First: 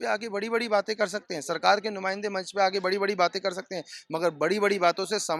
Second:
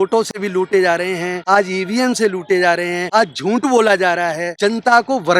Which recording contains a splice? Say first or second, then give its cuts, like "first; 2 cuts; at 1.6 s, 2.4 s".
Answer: second; 3 cuts; at 1.3 s, 3.0 s, 4.5 s